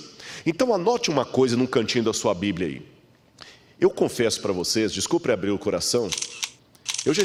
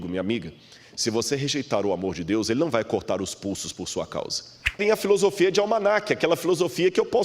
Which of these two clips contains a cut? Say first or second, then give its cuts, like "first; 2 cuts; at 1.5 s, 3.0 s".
second; 1 cut; at 4.8 s